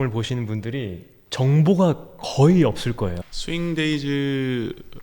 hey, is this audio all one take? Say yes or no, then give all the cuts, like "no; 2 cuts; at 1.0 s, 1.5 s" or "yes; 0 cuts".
no; 1 cut; at 3.2 s